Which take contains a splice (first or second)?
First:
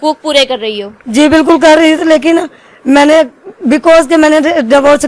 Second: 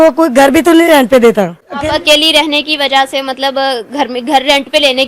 second